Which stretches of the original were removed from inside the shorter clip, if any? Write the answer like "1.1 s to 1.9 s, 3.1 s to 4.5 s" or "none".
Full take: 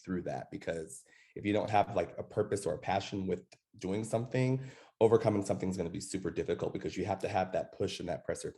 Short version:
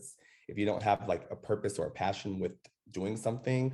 none